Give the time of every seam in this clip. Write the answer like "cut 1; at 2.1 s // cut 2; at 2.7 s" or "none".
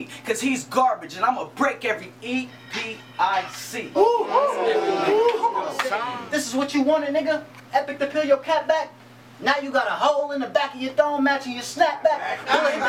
cut 1; at 6.0 s